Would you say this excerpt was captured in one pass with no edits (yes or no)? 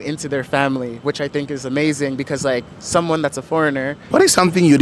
no